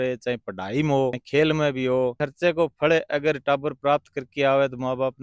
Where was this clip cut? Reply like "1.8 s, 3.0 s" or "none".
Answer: 1.2 s, 2.2 s